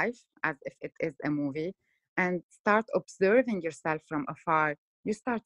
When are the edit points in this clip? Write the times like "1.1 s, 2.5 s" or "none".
2.5 s